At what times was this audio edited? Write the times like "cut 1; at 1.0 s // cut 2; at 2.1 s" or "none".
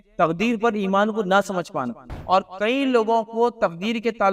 cut 1; at 2.1 s